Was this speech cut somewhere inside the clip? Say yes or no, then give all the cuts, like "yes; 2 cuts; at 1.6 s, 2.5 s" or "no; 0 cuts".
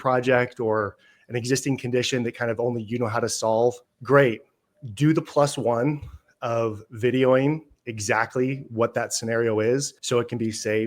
yes; 2 cuts; at 3.9 s, 10.0 s